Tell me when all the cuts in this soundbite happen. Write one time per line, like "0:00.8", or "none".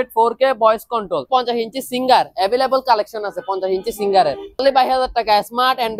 0:01.3
0:04.6